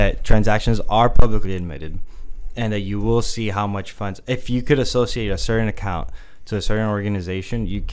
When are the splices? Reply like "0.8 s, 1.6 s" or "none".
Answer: none